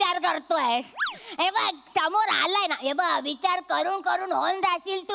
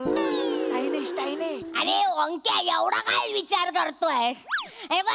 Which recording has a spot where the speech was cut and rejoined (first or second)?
second